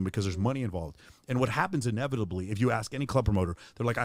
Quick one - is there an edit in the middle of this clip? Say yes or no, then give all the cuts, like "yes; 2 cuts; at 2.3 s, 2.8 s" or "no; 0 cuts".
no; 0 cuts